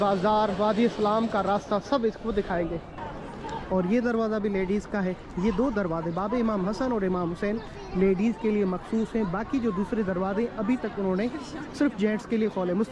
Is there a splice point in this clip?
yes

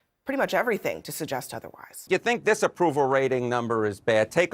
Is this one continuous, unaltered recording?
no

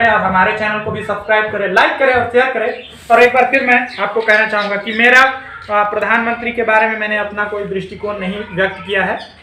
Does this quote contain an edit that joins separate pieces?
no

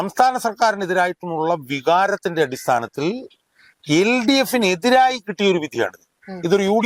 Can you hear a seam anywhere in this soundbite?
no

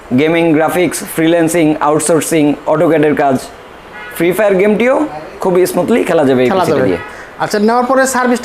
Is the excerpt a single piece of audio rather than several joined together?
yes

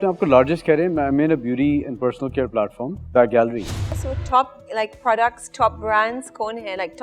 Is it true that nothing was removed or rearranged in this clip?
no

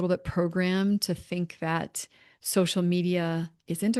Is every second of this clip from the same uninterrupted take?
yes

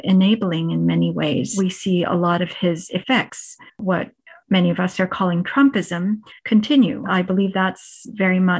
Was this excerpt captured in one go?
no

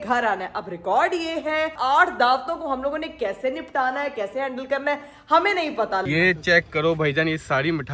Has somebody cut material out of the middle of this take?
yes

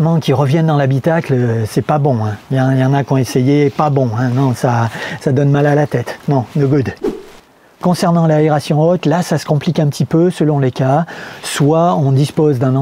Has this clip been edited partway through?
no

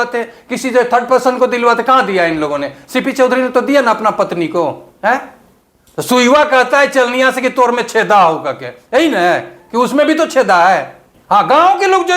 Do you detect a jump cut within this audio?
no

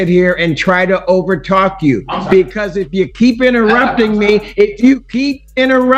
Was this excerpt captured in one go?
yes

